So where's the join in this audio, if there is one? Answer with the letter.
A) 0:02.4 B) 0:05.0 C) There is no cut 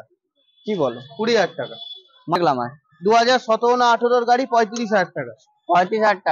A